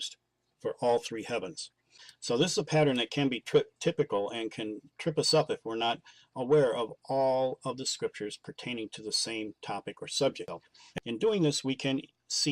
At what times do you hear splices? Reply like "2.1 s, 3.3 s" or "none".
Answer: 1.1 s